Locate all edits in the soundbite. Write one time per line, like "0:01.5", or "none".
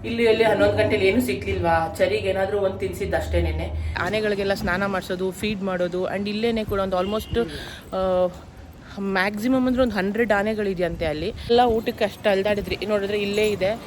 0:04.0
0:11.5